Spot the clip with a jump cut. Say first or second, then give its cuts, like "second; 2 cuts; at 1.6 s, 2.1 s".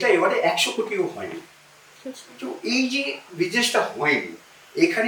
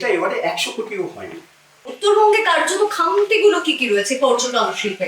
second; 1 cut; at 1.9 s